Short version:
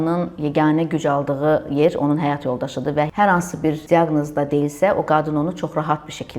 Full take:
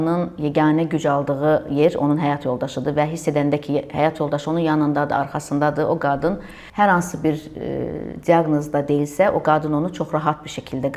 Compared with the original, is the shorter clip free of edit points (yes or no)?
no